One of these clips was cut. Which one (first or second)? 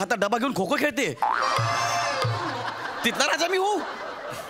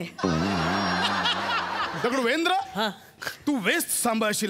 second